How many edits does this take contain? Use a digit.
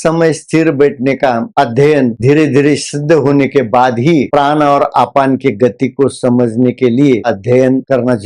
1